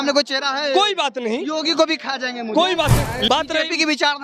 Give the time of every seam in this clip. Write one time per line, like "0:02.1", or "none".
0:03.3